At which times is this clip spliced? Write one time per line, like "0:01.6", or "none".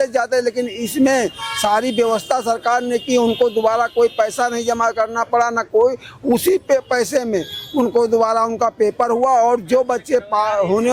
none